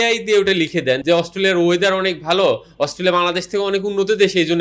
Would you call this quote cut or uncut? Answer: cut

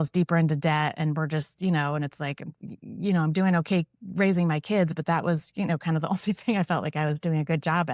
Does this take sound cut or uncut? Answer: uncut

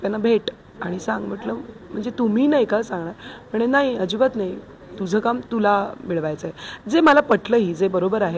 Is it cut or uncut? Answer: uncut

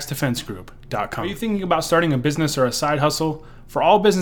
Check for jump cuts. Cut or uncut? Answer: cut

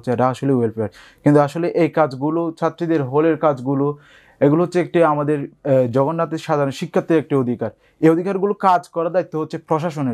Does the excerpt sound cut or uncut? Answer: uncut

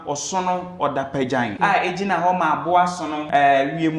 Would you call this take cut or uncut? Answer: cut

